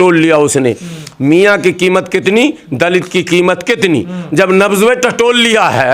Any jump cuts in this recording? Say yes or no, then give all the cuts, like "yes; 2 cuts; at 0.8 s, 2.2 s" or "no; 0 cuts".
no; 0 cuts